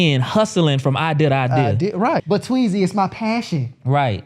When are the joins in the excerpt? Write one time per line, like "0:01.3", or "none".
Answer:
0:02.2